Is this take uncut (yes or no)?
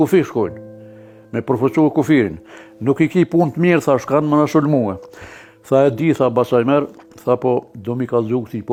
yes